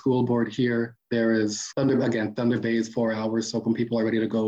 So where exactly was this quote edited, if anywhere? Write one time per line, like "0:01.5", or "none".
0:01.0
0:01.7

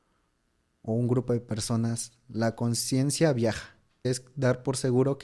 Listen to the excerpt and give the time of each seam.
0:04.1

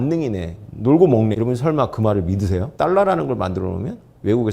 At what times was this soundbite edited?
0:01.3
0:02.7

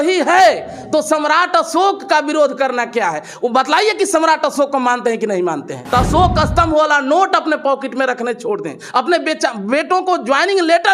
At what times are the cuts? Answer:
0:05.8

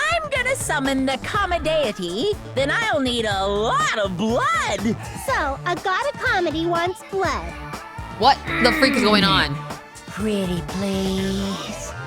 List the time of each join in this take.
none

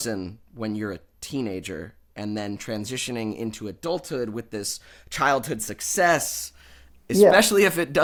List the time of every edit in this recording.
none

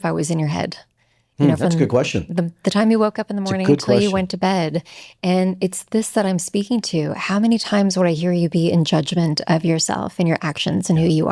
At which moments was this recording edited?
none

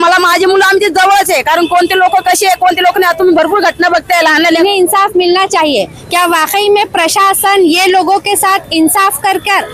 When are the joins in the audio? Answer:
0:04.6

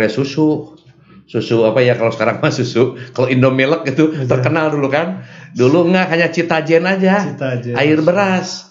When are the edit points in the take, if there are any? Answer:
none

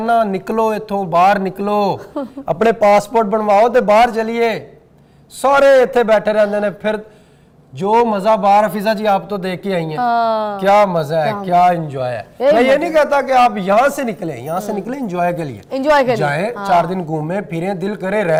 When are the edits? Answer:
none

